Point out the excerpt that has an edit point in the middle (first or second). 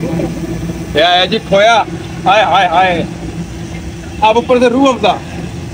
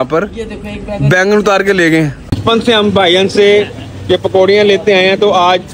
second